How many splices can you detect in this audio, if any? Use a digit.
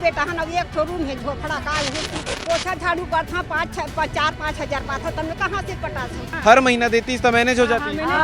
2